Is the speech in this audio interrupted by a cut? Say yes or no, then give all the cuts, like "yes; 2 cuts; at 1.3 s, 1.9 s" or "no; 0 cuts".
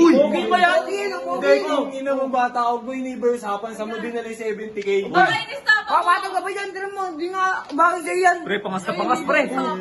no; 0 cuts